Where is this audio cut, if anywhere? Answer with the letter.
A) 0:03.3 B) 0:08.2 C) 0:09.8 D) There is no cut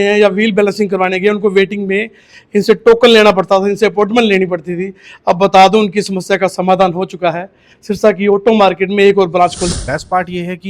C